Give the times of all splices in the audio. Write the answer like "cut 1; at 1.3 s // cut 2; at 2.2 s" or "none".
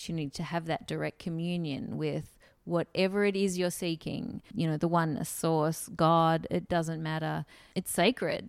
cut 1; at 4.4 s // cut 2; at 7.6 s